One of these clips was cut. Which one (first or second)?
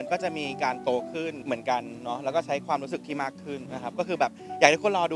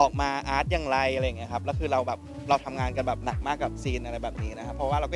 first